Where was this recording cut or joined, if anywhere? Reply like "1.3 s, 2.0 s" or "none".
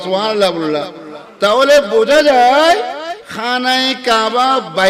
none